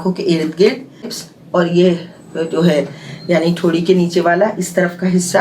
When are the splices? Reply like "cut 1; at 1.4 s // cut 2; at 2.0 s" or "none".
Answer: cut 1; at 1.1 s